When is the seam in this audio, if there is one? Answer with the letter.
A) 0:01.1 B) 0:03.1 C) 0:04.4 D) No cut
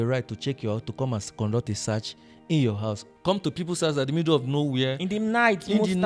B